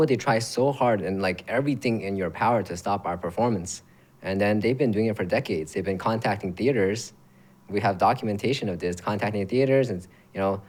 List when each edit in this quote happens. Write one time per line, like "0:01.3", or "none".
none